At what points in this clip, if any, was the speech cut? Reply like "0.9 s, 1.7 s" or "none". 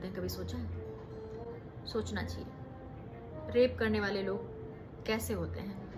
none